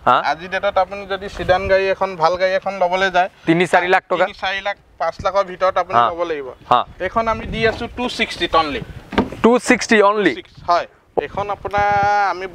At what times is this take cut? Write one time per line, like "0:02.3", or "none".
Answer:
0:11.2